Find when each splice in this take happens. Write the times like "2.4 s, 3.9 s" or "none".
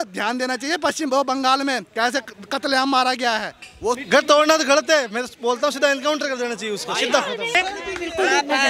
4.0 s, 7.5 s